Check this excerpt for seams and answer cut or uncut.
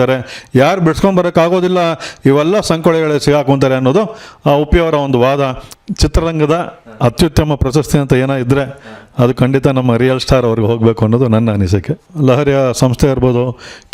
cut